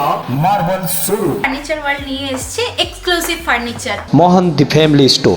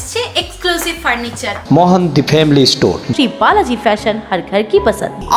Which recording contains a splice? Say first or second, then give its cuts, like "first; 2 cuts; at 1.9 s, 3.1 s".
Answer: first; 1 cut; at 1.4 s